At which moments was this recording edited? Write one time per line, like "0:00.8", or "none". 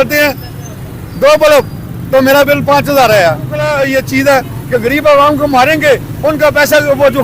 0:03.7